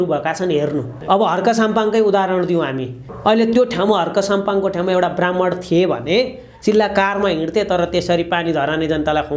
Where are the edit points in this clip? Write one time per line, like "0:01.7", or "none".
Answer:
0:00.9
0:03.1